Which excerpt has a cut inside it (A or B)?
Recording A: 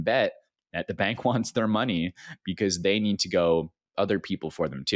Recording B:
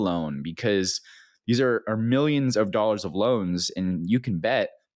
A